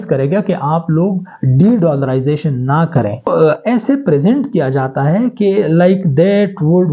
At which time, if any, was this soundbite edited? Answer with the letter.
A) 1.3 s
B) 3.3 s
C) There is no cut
B